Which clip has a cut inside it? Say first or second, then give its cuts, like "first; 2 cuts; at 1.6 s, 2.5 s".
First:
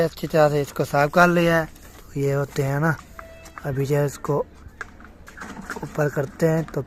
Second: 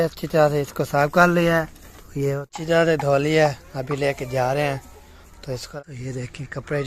second; 2 cuts; at 2.4 s, 5.7 s